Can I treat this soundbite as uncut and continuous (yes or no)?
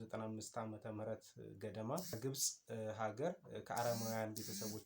no